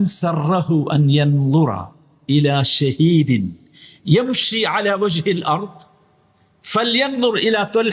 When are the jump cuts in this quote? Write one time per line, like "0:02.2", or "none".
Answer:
none